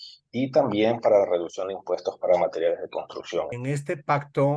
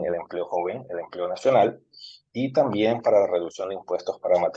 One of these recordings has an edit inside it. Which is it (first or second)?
first